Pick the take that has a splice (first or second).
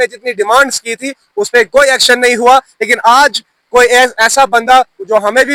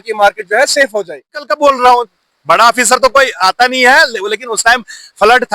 second